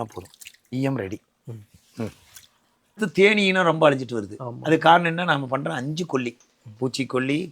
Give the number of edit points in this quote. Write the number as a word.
one